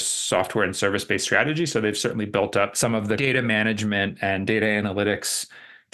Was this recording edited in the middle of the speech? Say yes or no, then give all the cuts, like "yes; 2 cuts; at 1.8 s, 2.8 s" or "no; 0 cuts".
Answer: yes; 1 cut; at 3.2 s